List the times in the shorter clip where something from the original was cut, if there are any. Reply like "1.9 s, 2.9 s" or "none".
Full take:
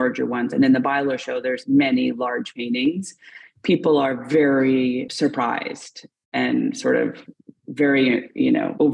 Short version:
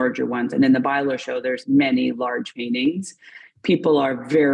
none